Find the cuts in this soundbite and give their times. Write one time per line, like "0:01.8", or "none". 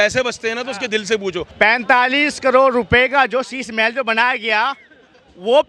0:01.5